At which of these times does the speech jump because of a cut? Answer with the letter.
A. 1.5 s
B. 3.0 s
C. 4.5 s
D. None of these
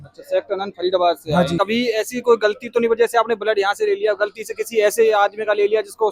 A